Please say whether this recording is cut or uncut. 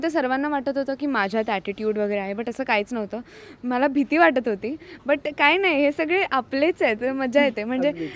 uncut